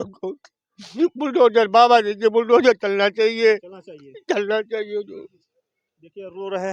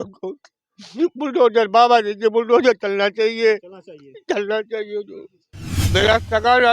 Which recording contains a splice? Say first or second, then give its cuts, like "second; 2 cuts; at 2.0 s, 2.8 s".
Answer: second; 1 cut; at 5.8 s